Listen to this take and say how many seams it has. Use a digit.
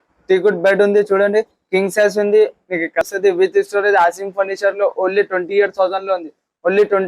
1